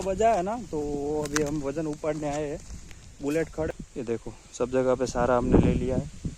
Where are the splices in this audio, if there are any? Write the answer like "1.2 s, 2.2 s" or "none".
3.7 s